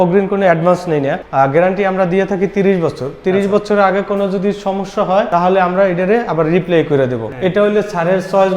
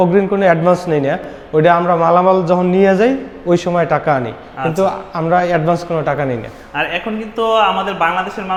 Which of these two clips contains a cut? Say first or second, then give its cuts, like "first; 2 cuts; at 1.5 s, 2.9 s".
first; 3 cuts; at 1.2 s, 5.3 s, 7.3 s